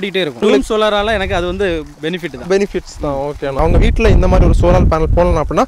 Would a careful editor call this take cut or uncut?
cut